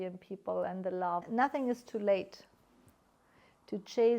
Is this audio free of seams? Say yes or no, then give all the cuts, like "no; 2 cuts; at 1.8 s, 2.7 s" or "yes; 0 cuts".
no; 1 cut; at 1.2 s